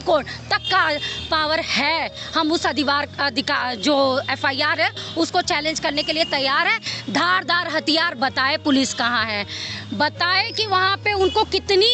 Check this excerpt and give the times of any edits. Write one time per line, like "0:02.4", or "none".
none